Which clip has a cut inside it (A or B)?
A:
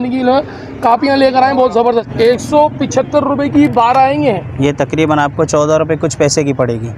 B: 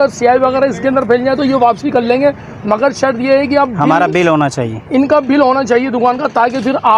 A